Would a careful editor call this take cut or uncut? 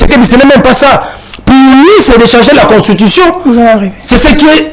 uncut